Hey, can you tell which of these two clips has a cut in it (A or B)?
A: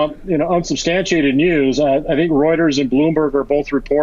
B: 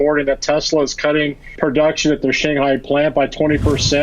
B